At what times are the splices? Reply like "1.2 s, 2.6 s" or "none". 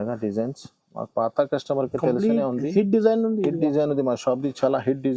none